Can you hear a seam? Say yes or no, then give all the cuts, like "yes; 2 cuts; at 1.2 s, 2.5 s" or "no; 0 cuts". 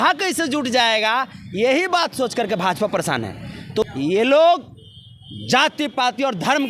yes; 1 cut; at 3.8 s